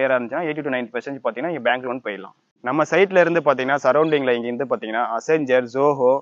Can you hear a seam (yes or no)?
yes